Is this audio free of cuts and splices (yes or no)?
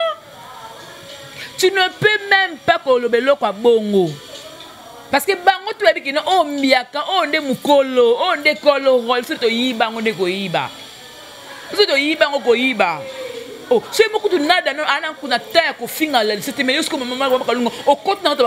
yes